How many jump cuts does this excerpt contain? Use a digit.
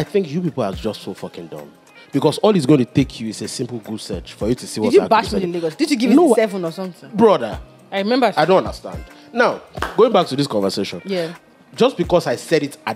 0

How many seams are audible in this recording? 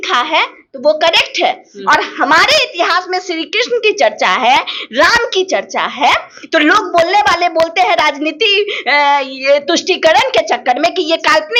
0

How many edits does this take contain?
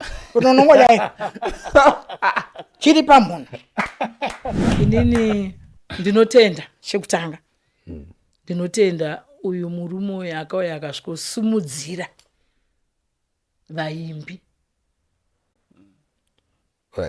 1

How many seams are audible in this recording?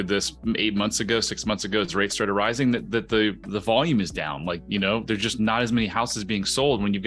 0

